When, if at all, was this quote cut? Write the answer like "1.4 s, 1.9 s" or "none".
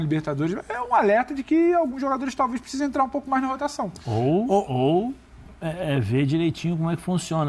none